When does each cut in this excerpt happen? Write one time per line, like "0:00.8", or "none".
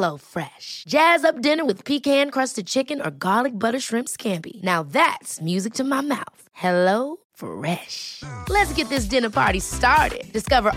none